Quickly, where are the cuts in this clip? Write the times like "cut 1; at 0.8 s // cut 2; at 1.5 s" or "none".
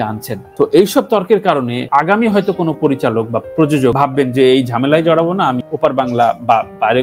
none